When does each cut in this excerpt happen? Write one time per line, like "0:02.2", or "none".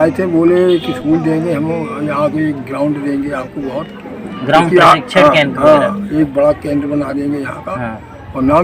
none

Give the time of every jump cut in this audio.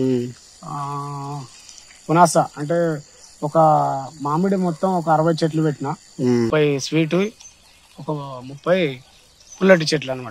0:06.5

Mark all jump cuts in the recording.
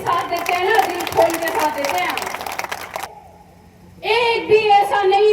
0:03.0

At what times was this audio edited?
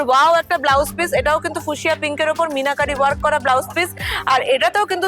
none

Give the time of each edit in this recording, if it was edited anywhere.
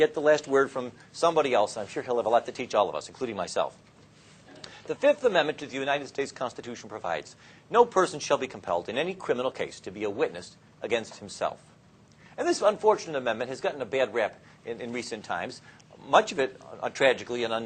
0:09.1

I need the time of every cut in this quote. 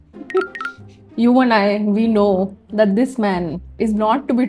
0:02.6

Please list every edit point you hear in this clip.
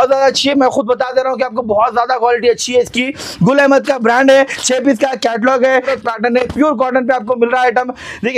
0:05.9

